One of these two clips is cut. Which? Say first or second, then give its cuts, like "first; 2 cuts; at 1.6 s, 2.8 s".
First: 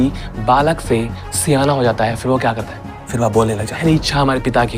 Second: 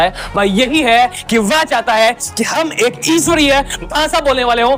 first; 1 cut; at 3.8 s